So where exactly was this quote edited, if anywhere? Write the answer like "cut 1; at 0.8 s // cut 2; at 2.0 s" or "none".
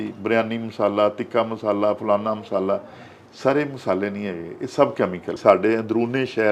cut 1; at 5.4 s